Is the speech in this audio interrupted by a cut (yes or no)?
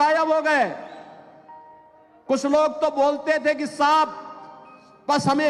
no